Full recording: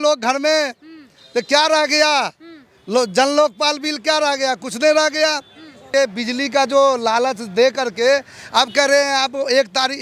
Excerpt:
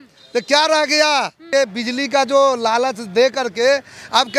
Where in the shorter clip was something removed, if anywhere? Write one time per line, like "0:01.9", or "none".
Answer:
0:01.4